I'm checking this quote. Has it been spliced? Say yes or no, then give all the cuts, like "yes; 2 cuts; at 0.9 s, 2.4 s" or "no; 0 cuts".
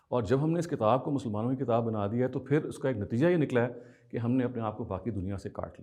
no; 0 cuts